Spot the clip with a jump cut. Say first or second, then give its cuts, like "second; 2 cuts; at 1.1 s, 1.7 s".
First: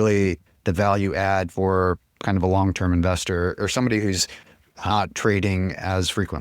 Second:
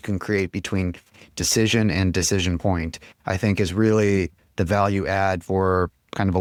first; 1 cut; at 4.9 s